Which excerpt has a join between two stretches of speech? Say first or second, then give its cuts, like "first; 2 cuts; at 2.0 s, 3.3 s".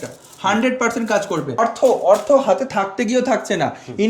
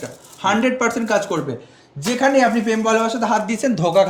first; 1 cut; at 1.6 s